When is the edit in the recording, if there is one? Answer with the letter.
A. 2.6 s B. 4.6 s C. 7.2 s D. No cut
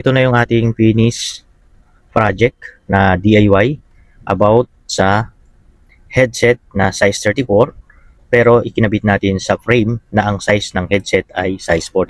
D